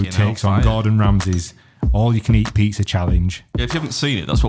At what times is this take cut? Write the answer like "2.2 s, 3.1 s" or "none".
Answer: none